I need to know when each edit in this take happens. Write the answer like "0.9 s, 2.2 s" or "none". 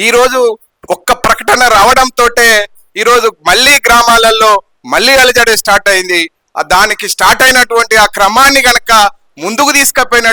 none